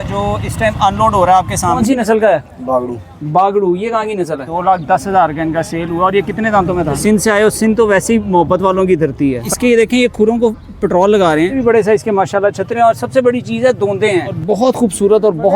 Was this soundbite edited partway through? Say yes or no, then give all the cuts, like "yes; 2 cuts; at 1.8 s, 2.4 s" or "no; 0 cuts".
yes; 6 cuts; at 1.8 s, 4.4 s, 7.0 s, 9.5 s, 11.6 s, 14.3 s